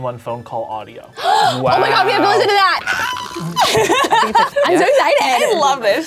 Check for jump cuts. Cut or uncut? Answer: uncut